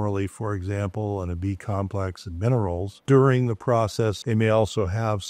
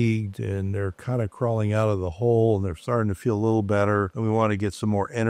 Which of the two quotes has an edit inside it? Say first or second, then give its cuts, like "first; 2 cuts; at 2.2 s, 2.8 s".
first; 2 cuts; at 3.0 s, 4.2 s